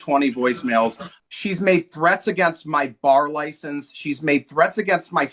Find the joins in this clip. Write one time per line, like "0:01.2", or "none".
0:01.1